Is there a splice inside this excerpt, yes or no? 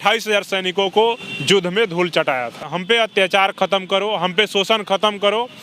yes